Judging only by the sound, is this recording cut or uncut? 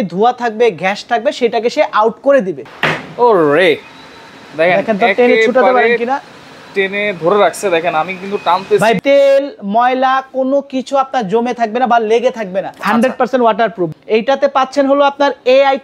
cut